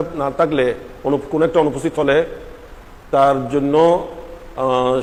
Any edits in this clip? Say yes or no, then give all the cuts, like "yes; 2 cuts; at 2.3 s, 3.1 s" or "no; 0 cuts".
no; 0 cuts